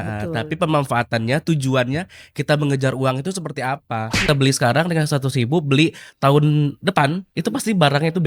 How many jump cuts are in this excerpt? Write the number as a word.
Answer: one